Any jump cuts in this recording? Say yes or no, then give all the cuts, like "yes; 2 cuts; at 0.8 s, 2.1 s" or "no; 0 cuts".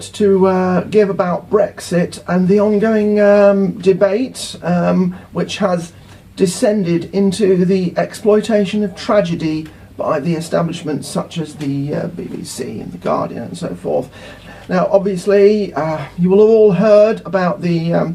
no; 0 cuts